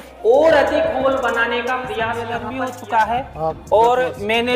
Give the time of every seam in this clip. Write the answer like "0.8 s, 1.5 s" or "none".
2.4 s